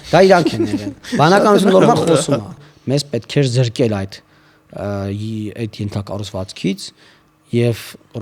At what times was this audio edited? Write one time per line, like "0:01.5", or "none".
0:02.6

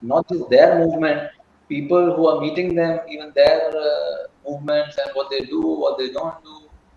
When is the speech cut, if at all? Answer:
none

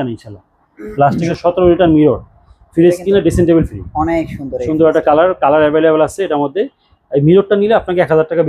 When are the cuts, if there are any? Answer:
0:01.3

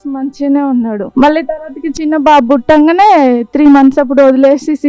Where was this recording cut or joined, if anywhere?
0:01.1

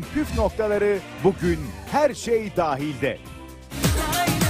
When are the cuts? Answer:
0:01.6
0:03.3

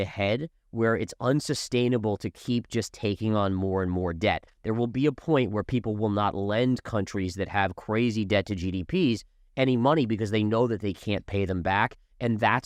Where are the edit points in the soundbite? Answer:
none

